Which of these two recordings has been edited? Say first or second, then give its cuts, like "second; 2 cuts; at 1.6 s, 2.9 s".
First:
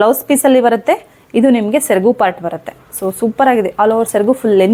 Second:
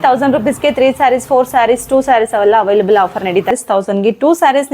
second; 1 cut; at 3.5 s